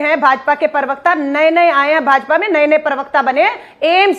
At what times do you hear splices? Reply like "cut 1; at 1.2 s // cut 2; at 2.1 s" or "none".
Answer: none